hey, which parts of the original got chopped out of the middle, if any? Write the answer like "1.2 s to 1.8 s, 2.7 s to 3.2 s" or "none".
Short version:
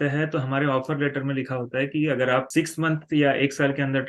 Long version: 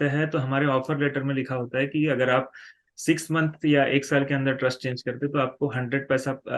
2.5 s to 3.0 s